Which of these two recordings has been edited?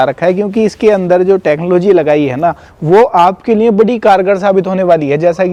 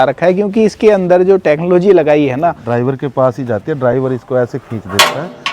second; 1 cut; at 2.6 s

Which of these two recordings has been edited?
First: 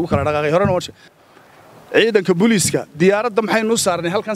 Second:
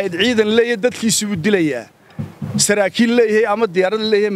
first; 1 cut; at 1.0 s

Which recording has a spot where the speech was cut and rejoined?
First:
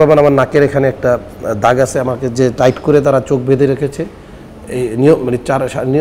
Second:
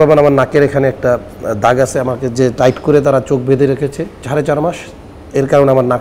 second; 1 cut; at 4.2 s

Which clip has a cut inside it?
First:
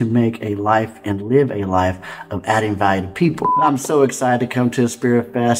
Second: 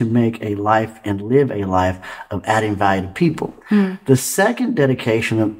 first; 1 cut; at 3.6 s

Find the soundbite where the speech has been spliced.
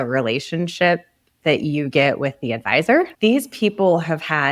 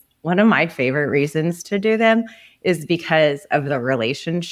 first; 1 cut; at 3.1 s

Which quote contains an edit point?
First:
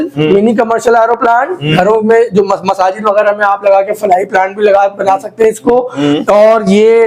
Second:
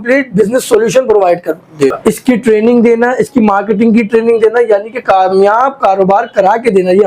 second; 1 cut; at 2.0 s

